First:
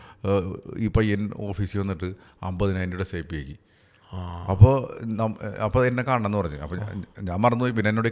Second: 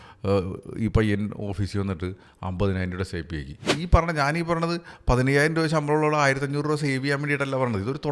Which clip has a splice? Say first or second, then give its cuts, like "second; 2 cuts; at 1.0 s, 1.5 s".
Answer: second; 1 cut; at 3.7 s